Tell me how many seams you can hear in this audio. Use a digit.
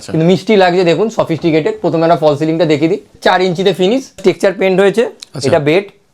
2